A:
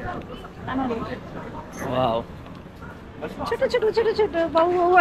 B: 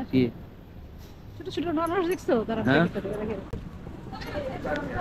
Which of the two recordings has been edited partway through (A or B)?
B